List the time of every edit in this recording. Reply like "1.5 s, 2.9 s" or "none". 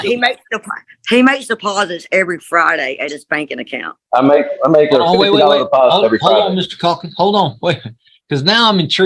none